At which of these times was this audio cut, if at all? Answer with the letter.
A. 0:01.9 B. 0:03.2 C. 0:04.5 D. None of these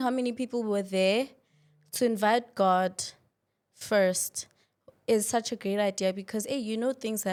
D